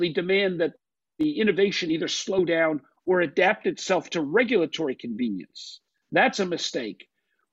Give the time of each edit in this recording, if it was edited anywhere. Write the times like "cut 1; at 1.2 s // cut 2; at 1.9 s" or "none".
none